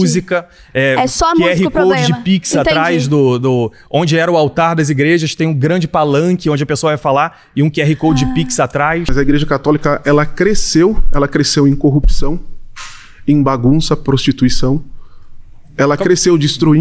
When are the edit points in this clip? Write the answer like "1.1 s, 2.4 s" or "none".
9.1 s